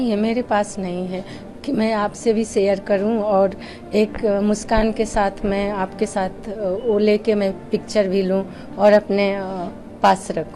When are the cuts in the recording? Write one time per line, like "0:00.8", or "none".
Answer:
none